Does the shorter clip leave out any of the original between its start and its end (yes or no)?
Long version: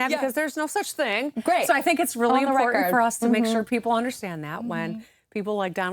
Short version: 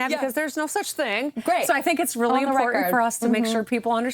no